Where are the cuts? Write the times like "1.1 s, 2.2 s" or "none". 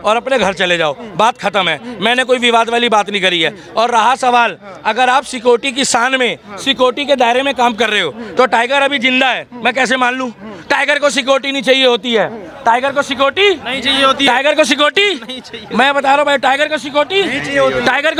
none